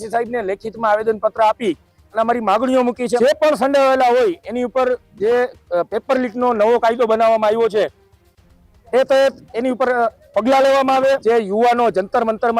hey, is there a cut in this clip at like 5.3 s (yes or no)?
no